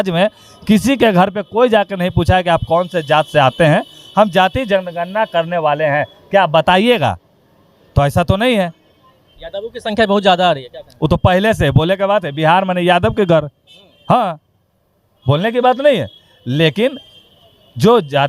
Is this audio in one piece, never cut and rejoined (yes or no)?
yes